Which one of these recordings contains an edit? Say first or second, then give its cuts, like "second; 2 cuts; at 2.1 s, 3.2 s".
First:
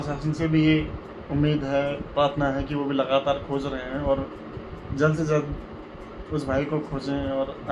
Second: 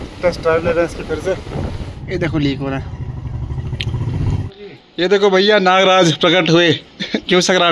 second; 2 cuts; at 1.6 s, 4.5 s